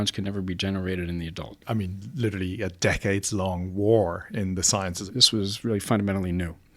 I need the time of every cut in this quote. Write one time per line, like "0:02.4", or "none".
0:01.5
0:05.0